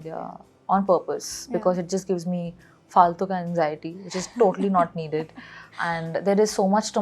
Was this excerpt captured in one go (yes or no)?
yes